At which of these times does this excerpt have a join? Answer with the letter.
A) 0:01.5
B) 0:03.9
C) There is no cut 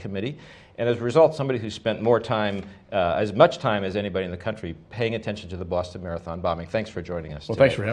B